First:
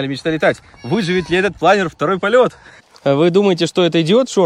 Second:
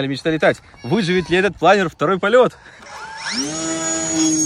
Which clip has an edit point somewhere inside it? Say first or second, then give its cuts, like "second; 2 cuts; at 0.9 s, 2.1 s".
first; 1 cut; at 2.9 s